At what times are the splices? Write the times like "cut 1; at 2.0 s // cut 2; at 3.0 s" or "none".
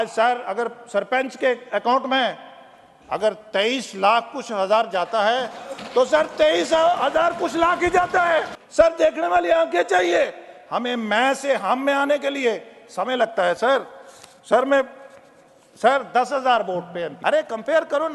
cut 1; at 8.6 s // cut 2; at 17.1 s